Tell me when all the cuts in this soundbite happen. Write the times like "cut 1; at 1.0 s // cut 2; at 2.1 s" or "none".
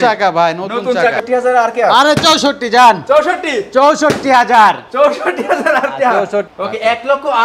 cut 1; at 1.2 s // cut 2; at 6.5 s